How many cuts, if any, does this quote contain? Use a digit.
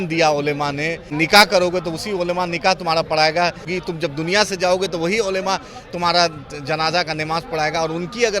2